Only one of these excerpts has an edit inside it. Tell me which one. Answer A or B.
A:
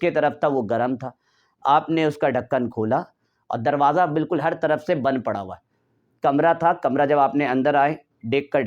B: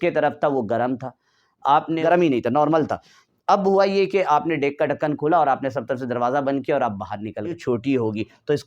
B